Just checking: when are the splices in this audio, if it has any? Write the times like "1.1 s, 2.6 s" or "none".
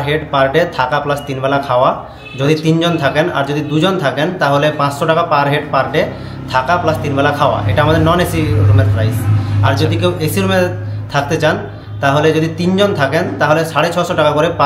none